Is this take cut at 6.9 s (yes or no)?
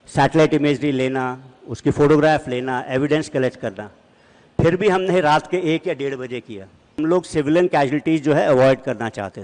yes